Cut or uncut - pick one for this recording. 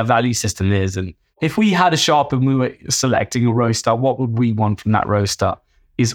cut